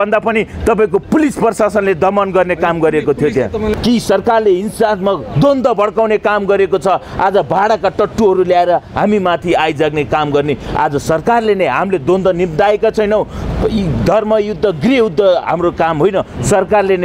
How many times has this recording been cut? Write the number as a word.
one